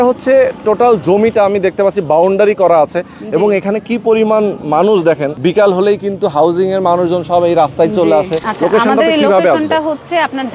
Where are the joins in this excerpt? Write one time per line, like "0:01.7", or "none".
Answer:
0:05.3
0:08.4